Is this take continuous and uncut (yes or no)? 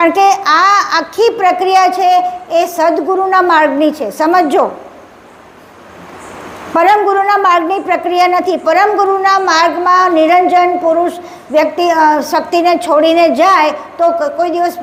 yes